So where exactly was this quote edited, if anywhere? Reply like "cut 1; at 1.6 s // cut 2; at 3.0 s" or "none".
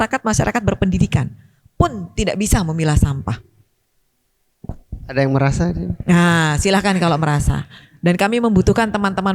none